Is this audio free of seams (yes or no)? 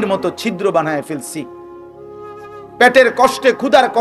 yes